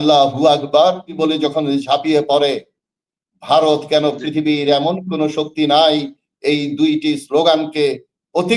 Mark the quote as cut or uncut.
cut